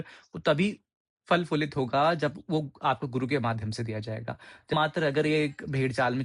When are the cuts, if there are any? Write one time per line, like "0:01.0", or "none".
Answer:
0:04.7